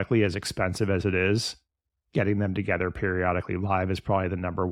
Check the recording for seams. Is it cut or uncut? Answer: uncut